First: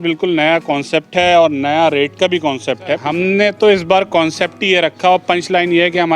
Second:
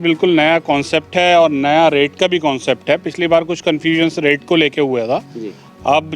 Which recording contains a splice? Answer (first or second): first